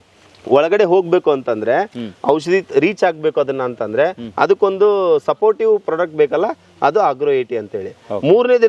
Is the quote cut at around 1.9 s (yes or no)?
no